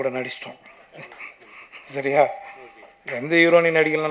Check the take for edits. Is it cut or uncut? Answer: uncut